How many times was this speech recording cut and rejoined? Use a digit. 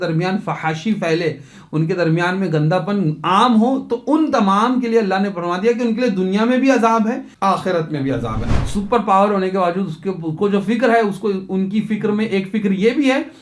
2